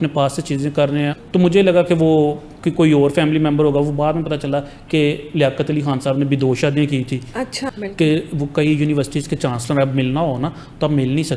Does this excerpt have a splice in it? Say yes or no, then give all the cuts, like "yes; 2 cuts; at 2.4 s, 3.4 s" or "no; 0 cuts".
yes; 2 cuts; at 1.2 s, 7.6 s